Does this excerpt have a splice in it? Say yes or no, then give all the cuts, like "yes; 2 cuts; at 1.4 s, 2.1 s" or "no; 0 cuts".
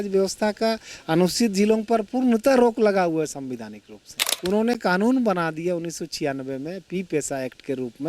yes; 1 cut; at 4.3 s